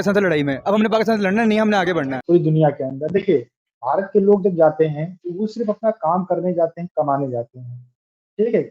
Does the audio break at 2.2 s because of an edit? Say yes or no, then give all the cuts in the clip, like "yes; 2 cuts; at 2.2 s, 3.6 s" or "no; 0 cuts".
yes; 1 cut; at 2.2 s